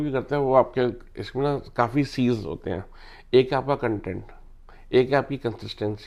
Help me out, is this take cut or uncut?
uncut